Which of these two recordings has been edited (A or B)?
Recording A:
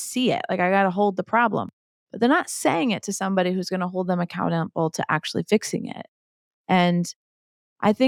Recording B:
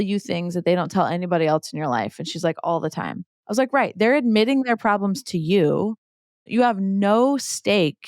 B